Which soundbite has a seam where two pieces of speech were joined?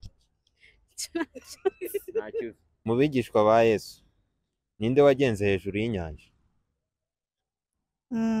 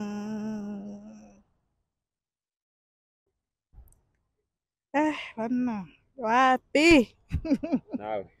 first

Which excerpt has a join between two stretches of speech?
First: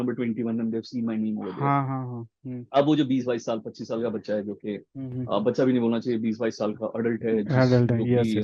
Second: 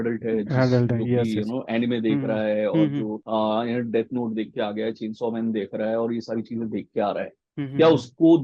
second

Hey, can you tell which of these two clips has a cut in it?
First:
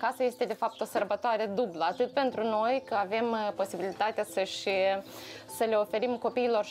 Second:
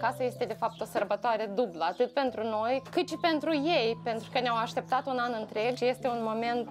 second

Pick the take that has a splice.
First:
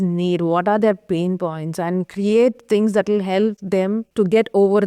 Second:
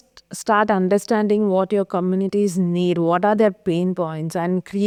first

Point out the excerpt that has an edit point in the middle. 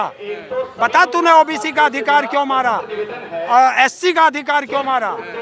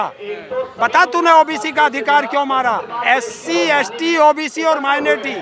second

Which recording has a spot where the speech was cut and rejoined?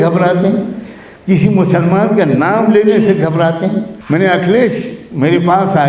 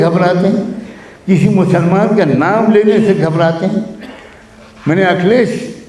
first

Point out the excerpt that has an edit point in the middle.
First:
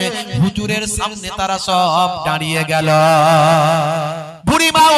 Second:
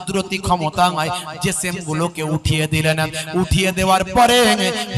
first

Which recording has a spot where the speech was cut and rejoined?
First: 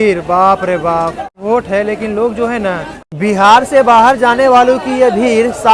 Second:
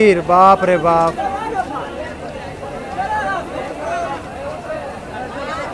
first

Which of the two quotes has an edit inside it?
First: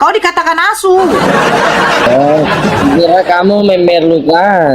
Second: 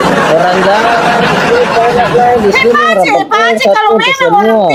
first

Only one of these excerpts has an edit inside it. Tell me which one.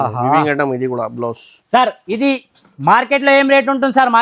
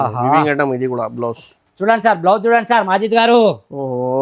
second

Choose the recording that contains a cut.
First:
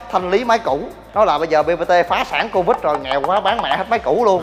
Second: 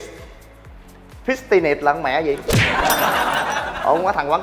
first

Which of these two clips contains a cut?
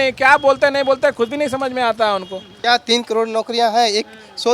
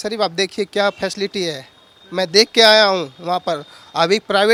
first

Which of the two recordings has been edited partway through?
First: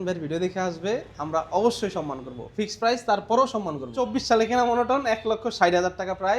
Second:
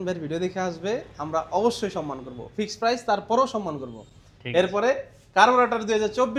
first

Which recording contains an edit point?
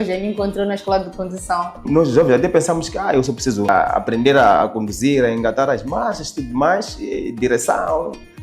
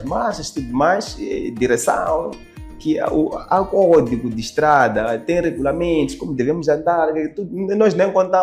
first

